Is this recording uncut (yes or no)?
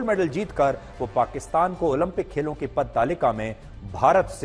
yes